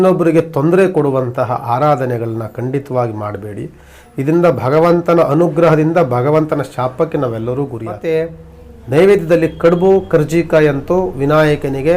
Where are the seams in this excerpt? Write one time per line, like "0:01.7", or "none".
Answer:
0:08.0